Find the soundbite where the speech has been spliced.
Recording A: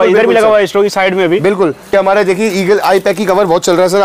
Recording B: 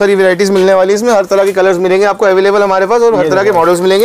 A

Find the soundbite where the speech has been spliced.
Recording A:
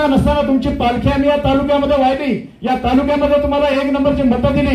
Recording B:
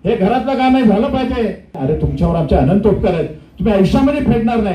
B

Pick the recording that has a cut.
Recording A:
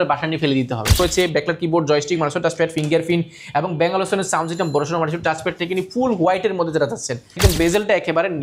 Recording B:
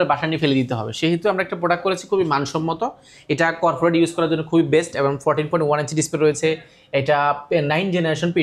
A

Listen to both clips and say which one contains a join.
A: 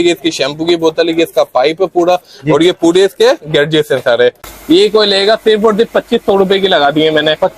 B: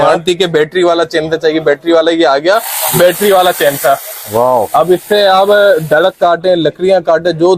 A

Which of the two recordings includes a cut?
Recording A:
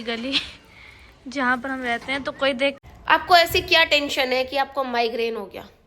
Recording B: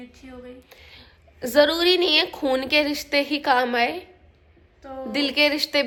A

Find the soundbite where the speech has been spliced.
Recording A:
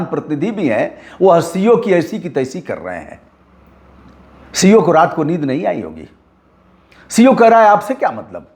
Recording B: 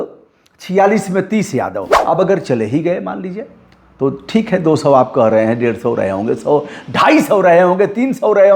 B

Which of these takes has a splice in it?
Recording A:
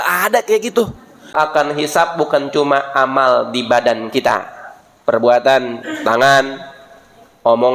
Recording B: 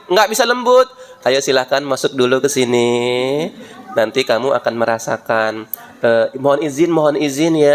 A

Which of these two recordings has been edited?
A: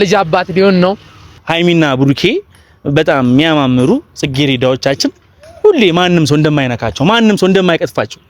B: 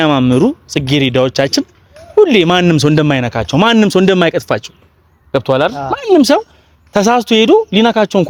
A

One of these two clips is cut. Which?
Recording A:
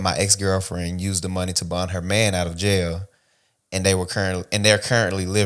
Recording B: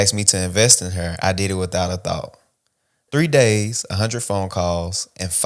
B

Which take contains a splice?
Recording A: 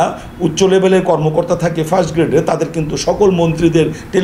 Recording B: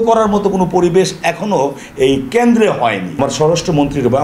B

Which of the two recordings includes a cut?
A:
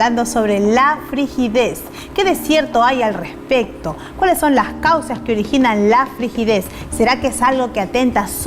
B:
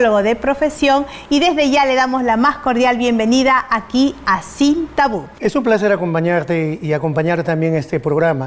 A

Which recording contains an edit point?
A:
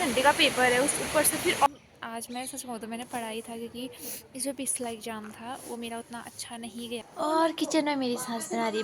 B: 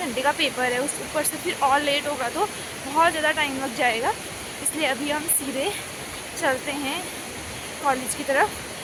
A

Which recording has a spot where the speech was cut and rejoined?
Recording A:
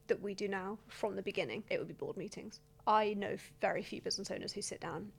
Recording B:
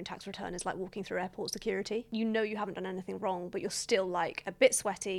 A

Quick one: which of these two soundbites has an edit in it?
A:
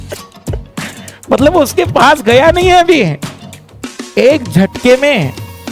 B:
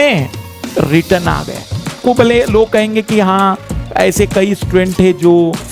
B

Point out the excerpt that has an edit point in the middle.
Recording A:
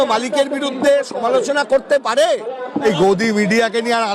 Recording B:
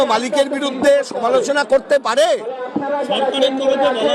A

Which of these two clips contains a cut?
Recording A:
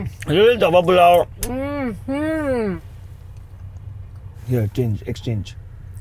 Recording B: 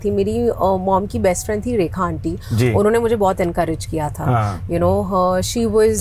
A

